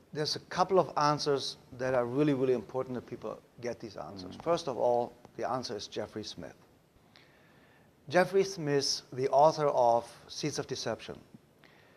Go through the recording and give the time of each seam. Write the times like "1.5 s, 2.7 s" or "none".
5.6 s